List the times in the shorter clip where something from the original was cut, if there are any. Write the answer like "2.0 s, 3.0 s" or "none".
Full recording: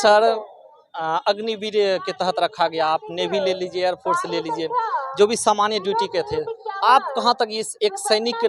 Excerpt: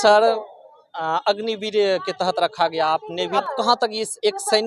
3.4 s